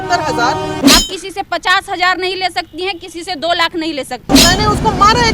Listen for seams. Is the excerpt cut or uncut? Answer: cut